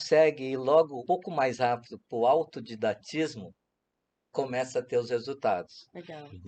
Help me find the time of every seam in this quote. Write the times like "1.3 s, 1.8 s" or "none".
1.0 s